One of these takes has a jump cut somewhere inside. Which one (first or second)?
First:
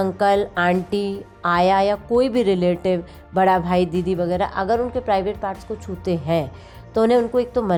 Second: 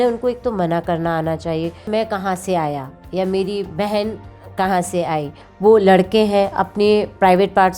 second